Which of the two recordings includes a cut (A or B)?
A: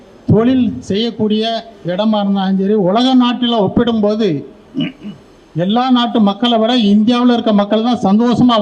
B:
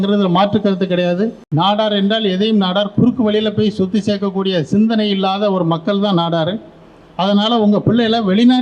B